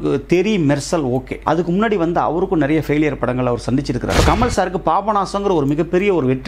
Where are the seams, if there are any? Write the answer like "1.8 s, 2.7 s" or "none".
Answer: 1.3 s, 4.1 s

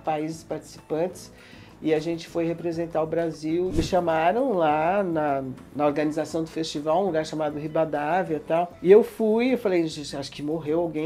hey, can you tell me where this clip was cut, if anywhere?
3.7 s

